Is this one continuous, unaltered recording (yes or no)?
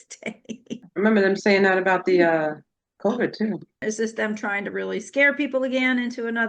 no